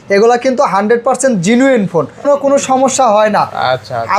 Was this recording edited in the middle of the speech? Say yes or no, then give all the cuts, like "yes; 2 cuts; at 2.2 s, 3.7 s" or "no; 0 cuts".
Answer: yes; 1 cut; at 2.3 s